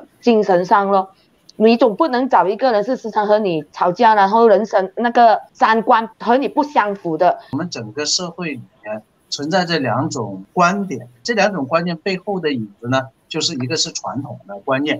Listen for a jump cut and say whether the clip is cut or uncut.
cut